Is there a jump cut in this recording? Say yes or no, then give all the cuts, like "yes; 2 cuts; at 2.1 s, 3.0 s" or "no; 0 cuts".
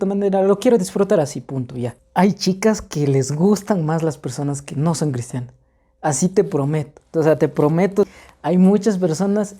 yes; 2 cuts; at 2.0 s, 8.2 s